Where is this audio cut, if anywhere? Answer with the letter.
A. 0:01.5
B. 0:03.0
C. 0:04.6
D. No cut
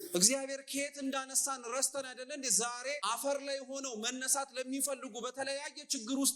B